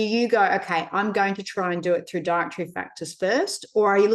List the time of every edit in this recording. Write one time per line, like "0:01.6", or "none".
none